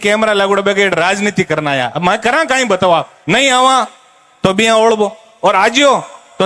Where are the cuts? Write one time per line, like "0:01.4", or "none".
none